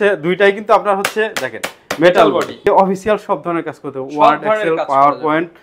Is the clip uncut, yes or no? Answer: no